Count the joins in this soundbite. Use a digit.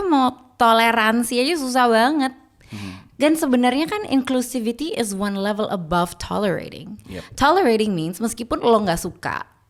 0